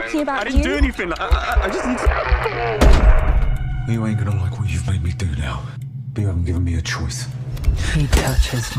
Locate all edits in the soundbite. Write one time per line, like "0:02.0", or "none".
0:07.6

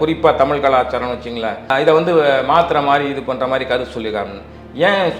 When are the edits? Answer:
0:01.7

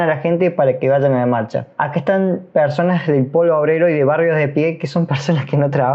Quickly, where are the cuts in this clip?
0:01.6

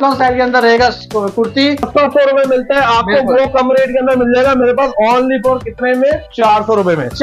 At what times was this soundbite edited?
0:01.9

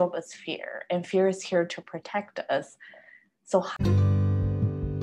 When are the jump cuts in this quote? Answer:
0:03.8

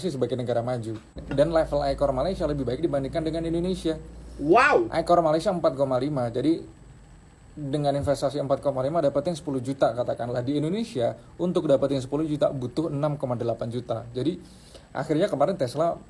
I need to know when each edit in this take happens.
none

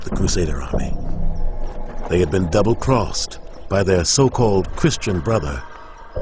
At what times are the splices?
0:02.2

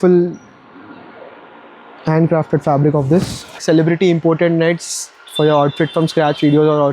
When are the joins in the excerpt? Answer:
0:03.6

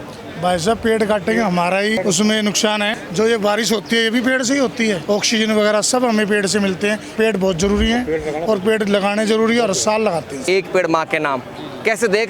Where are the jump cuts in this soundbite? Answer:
0:02.0
0:03.0
0:05.0
0:07.1
0:10.5

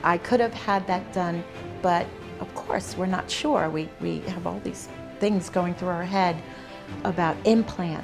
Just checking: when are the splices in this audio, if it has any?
0:01.7

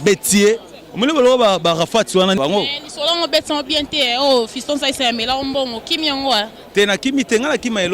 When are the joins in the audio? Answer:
0:02.4

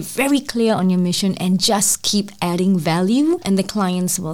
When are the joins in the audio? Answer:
0:03.4

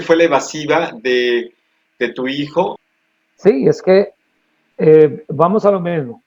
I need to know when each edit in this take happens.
0:02.8

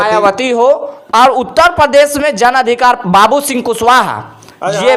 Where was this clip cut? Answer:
none

